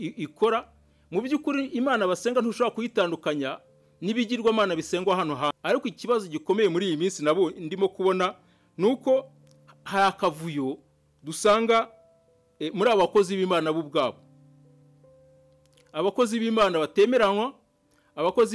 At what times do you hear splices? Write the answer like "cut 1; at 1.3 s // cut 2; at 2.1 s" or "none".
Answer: cut 1; at 5.5 s